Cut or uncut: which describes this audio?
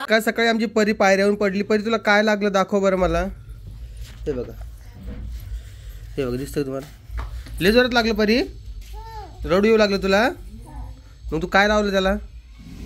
uncut